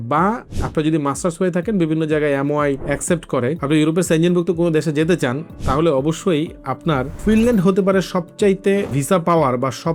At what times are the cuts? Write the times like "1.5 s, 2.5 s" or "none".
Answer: 3.4 s, 7.1 s, 9.0 s